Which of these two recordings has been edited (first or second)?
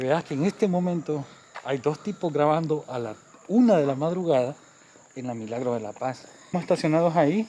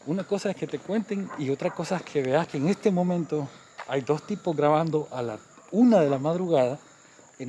first